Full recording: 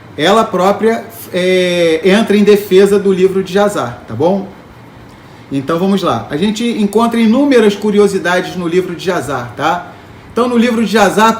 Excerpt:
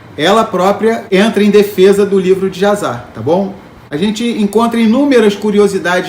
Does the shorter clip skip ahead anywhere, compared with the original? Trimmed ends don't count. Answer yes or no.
yes